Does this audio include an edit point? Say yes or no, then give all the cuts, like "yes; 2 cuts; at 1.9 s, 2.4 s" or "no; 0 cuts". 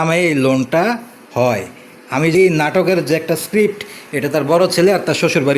yes; 1 cut; at 2.3 s